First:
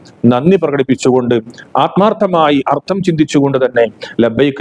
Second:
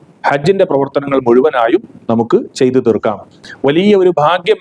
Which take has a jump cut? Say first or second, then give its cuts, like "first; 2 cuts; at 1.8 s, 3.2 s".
second; 1 cut; at 3.4 s